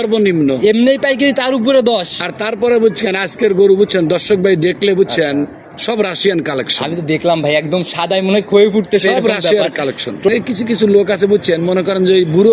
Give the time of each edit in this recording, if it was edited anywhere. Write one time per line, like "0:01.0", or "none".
0:10.3